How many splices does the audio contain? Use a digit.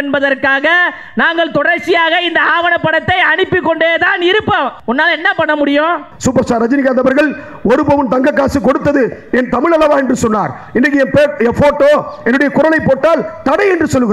2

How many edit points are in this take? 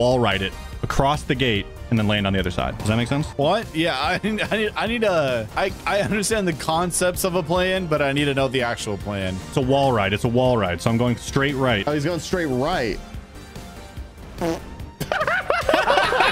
3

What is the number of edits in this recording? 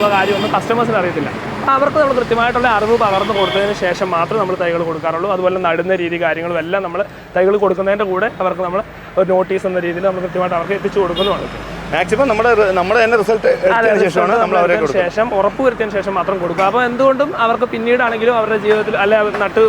0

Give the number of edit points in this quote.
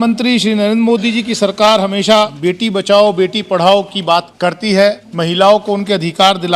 3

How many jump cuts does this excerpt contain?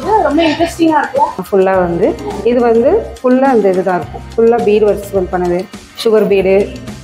1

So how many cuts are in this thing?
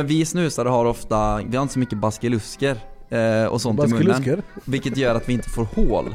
1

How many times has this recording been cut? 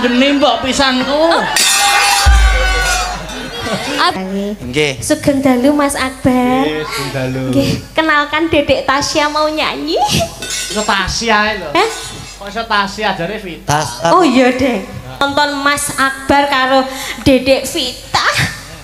2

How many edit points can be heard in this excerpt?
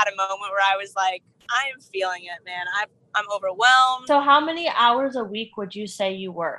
1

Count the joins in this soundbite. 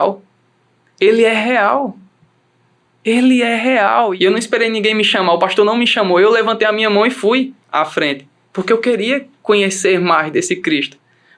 1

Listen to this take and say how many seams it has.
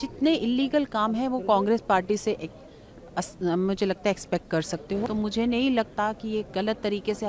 1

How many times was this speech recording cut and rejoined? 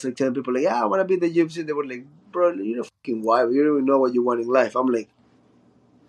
0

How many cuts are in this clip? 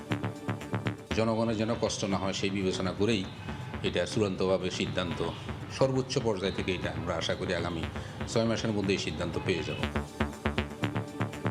2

